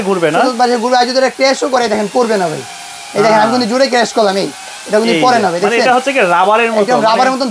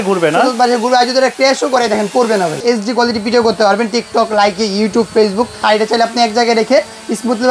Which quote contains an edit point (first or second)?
second